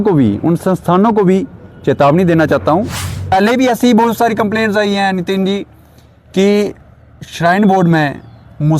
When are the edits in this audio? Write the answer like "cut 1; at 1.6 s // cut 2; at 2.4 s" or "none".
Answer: cut 1; at 3.2 s